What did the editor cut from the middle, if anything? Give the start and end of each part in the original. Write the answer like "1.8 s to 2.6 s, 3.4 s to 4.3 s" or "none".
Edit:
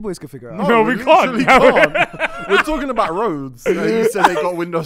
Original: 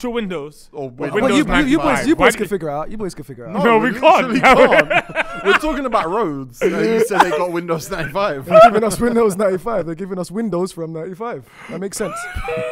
none